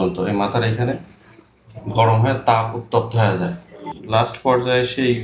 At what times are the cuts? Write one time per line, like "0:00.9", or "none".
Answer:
0:03.7

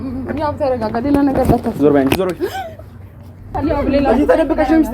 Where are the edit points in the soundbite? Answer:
0:03.4

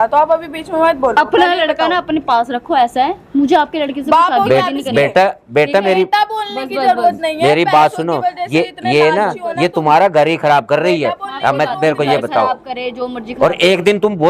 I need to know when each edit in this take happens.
none

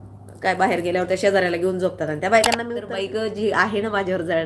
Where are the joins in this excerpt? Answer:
0:02.9

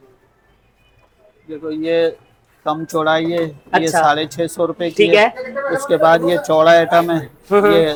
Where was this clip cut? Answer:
none

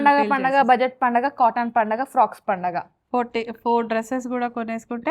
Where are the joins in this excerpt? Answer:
none

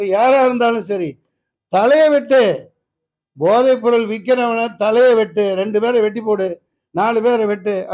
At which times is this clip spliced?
none

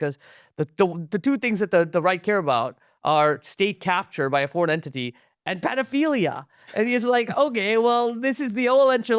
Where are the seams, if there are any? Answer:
none

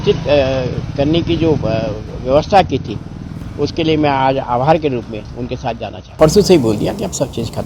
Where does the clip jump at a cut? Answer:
0:06.2

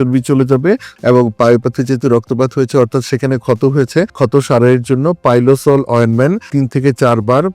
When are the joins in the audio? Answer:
0:01.0

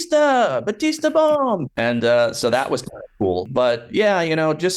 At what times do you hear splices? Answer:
0:01.7
0:03.5

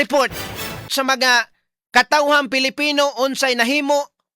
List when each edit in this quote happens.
0:01.2

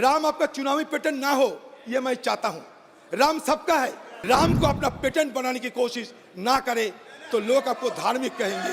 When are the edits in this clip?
0:04.1

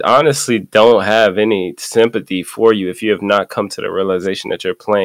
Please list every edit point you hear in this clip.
none

